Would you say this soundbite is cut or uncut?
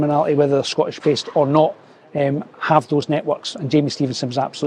uncut